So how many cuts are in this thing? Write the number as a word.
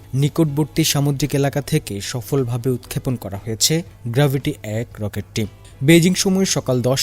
zero